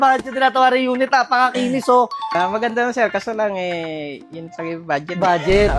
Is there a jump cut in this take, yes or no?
yes